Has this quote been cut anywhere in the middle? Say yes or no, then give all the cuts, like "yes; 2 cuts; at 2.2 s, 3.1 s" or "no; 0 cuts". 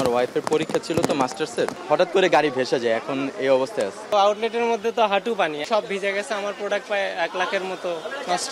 yes; 3 cuts; at 1.8 s, 4.0 s, 5.6 s